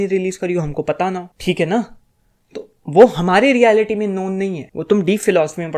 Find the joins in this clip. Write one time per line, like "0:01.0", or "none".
0:01.3
0:04.7